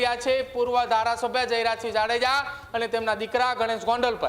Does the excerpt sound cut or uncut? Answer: uncut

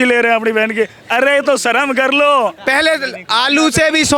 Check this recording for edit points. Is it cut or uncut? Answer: cut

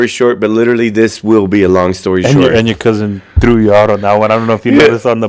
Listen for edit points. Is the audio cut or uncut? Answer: uncut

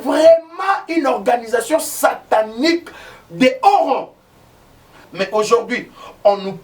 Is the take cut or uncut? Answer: cut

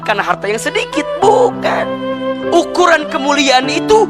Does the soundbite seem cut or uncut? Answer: cut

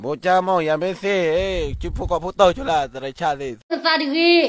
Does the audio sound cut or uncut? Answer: cut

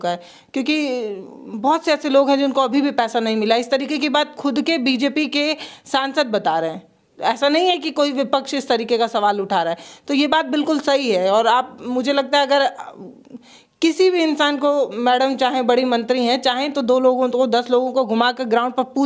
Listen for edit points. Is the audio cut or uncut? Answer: uncut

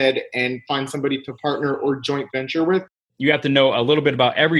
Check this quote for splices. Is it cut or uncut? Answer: cut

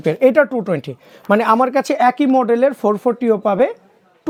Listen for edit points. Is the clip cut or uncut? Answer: uncut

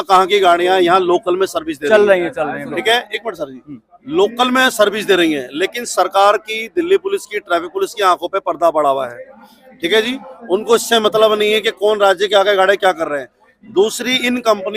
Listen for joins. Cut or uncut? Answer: uncut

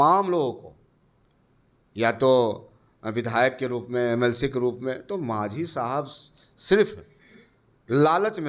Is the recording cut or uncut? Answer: uncut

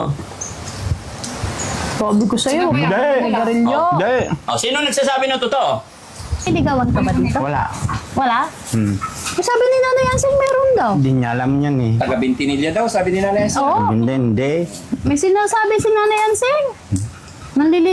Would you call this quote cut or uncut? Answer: cut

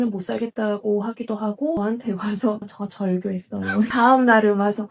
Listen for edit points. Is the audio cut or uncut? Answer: cut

